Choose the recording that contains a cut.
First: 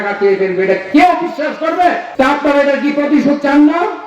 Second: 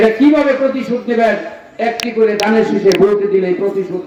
first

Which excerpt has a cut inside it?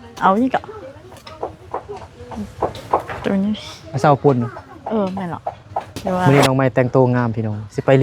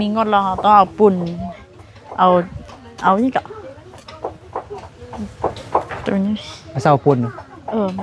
first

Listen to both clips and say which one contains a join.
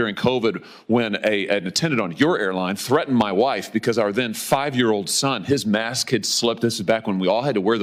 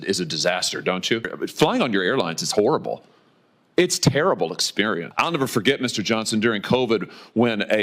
second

